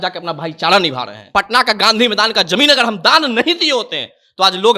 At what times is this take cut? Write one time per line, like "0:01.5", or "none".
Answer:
0:01.3